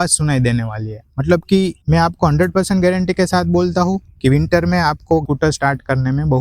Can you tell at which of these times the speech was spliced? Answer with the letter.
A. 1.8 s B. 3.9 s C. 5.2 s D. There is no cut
A